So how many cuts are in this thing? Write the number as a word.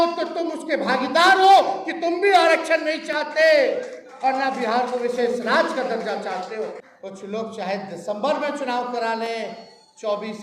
one